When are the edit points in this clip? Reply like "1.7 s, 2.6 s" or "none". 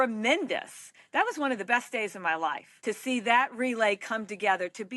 2.7 s